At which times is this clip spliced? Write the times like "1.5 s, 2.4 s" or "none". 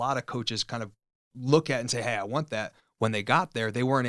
1.2 s

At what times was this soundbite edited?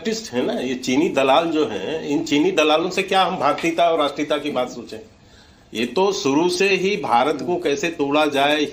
none

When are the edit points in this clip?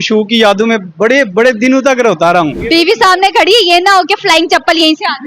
2.6 s

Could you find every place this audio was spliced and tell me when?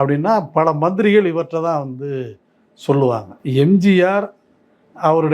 3.3 s

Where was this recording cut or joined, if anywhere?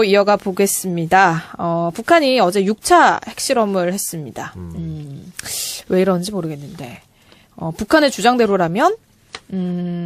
none

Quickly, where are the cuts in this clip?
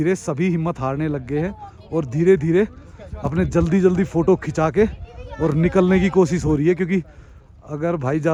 none

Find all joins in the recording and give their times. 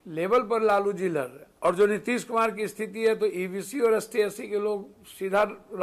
1.4 s

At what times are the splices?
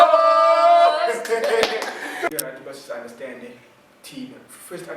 2.3 s

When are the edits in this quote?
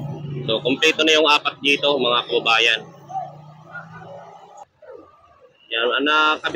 4.6 s

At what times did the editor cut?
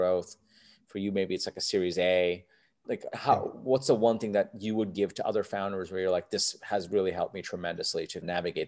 none

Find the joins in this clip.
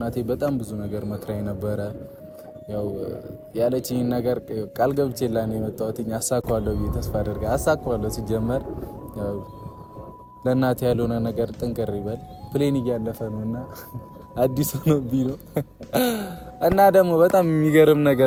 none

